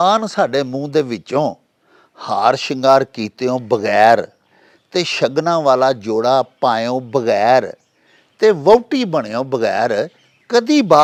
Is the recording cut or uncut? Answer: uncut